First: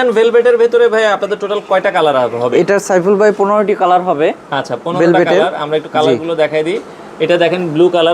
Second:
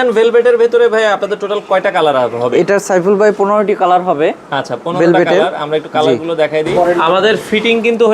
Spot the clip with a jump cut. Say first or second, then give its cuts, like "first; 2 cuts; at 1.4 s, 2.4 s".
second; 1 cut; at 6.8 s